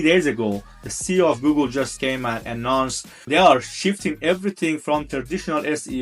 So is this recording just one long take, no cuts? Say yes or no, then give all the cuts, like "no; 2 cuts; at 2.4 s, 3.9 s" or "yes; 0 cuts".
no; 3 cuts; at 1.9 s, 3.3 s, 5.1 s